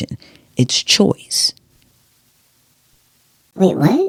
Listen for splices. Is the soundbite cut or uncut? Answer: uncut